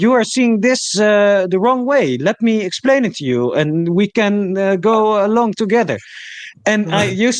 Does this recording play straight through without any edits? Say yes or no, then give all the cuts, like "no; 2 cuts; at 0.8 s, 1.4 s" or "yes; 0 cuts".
yes; 0 cuts